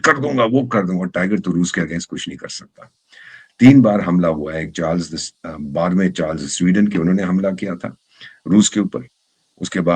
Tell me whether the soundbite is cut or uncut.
uncut